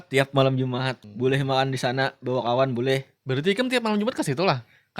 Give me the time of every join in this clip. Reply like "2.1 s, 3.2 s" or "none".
1.0 s